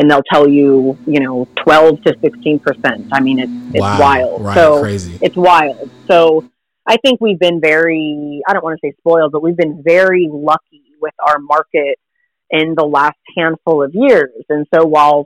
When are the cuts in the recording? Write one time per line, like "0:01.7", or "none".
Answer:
none